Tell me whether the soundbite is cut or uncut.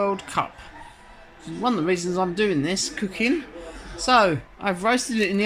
uncut